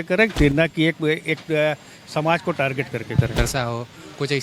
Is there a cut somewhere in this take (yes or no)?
yes